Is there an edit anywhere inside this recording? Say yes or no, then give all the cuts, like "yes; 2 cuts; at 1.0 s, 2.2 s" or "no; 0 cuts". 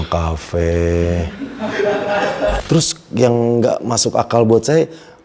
yes; 1 cut; at 2.6 s